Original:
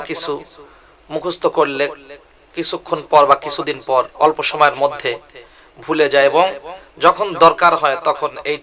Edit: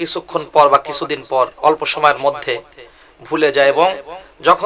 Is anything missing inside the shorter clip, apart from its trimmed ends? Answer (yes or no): no